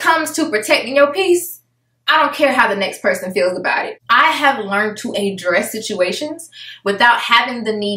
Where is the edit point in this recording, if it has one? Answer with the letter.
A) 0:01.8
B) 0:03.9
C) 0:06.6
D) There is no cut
B